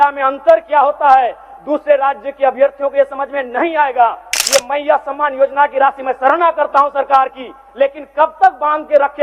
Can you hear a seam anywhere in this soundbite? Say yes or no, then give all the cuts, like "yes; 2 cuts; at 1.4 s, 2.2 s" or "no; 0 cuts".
yes; 1 cut; at 4.3 s